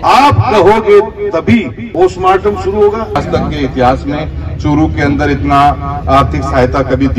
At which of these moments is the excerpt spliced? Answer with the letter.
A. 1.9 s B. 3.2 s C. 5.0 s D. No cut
B